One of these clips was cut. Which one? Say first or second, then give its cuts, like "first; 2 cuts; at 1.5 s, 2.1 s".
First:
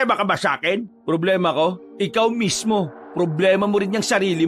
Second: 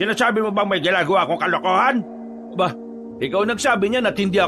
first; 3 cuts; at 0.9 s, 1.9 s, 3.0 s